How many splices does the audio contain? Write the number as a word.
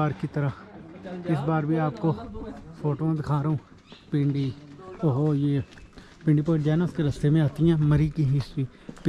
zero